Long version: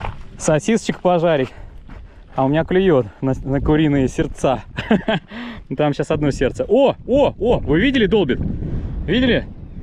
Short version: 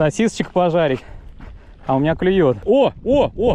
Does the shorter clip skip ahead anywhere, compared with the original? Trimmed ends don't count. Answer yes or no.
yes